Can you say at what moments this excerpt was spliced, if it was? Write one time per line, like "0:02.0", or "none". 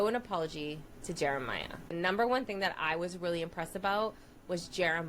0:01.9